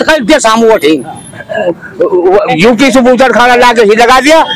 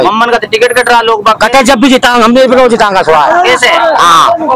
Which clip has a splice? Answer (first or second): first